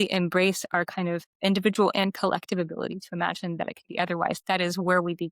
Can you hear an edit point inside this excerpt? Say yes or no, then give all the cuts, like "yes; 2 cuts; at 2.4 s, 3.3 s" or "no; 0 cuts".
no; 0 cuts